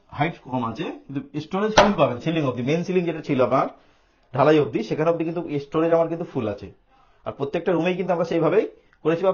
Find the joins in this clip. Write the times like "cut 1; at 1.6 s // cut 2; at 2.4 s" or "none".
none